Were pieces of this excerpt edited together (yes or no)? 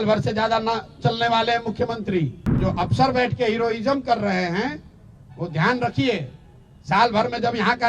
yes